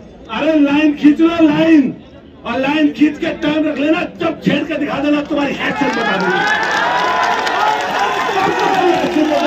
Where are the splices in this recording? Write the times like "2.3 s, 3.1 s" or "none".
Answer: none